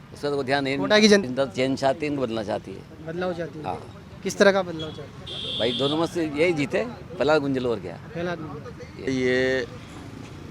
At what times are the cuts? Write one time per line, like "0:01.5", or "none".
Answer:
0:01.2
0:09.1